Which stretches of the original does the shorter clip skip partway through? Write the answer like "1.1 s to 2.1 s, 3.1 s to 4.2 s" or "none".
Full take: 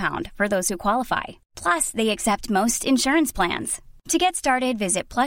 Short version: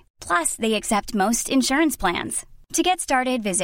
none